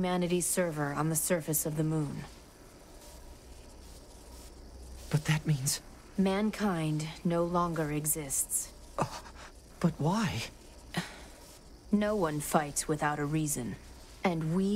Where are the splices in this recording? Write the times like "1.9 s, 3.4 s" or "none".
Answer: 9.6 s